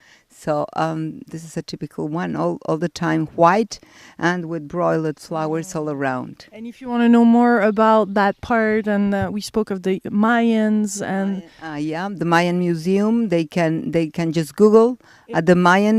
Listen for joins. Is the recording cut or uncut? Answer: cut